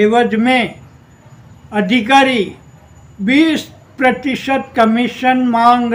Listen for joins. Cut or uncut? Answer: uncut